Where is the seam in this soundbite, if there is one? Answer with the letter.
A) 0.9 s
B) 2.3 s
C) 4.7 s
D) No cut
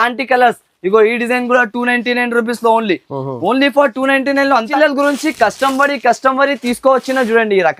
C